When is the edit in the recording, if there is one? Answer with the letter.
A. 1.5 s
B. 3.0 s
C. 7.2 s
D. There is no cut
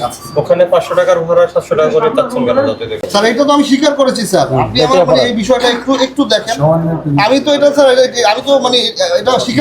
B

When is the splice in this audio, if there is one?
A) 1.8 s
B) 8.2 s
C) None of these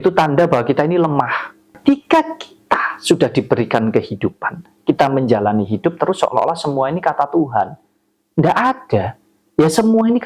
A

